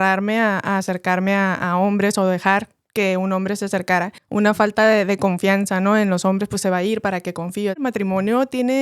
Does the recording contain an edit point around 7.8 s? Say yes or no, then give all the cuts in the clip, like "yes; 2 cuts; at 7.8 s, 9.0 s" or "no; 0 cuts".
yes; 2 cuts; at 4.2 s, 7.8 s